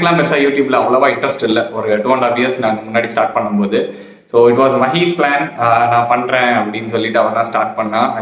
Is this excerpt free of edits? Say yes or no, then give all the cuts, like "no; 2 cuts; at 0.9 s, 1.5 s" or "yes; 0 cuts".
yes; 0 cuts